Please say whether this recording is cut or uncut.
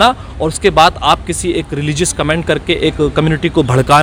uncut